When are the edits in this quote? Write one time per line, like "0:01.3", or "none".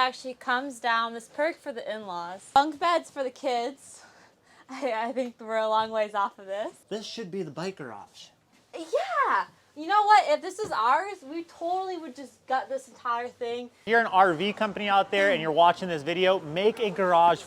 0:02.6
0:06.8
0:13.8